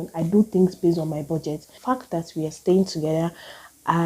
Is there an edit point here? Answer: yes; 1 cut; at 1.8 s

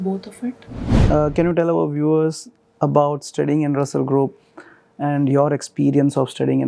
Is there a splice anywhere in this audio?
yes; 1 cut; at 0.9 s

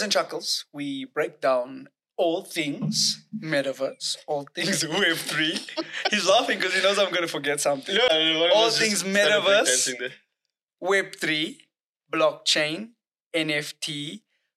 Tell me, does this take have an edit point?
yes; 1 cut; at 8.1 s

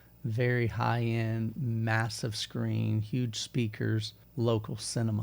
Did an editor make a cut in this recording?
yes; 1 cut; at 4.2 s

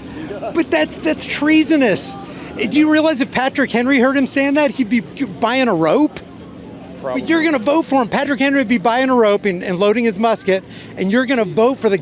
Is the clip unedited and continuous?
yes; 0 cuts

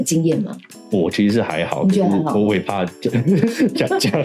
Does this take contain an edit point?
no; 0 cuts

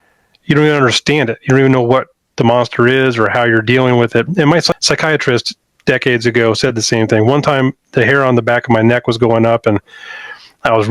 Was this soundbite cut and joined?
yes; 1 cut; at 4.7 s

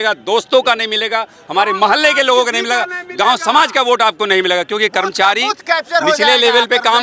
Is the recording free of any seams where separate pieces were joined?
yes; 0 cuts

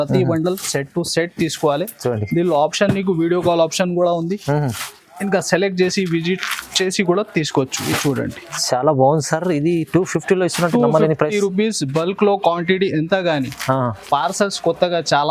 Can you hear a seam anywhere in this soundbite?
no; 0 cuts

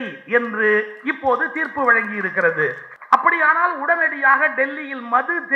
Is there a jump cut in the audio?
yes; 1 cut; at 2.9 s

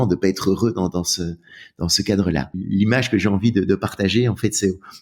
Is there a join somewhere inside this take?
yes; 1 cut; at 2.6 s

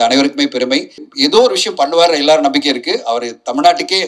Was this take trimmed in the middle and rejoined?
yes; 1 cut; at 1.0 s

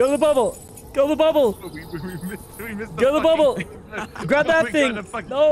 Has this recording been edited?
no; 0 cuts

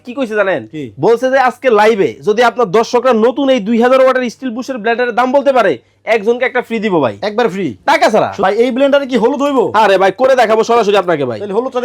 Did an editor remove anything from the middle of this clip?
yes; 1 cut; at 8.3 s

